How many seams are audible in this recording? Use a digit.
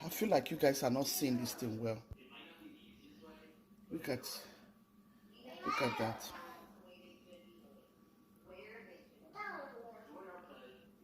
0